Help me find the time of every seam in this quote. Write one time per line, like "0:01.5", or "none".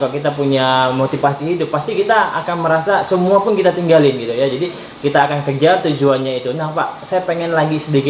none

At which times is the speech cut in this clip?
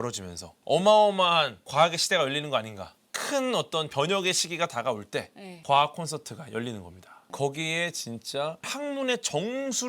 0:07.2
0:08.7

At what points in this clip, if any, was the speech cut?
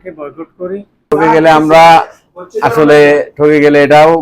0:01.0

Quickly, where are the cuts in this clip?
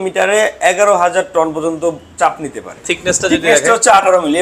0:02.8

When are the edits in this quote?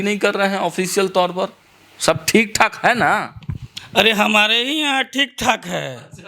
none

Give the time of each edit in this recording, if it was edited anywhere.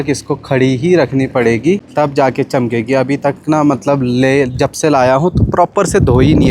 0:01.9

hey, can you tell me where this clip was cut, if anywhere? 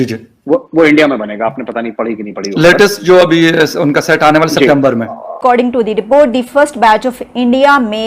0:05.4

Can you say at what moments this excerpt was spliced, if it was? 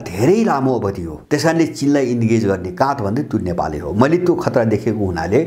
0:01.1

